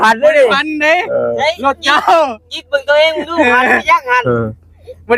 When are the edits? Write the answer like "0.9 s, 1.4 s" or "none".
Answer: none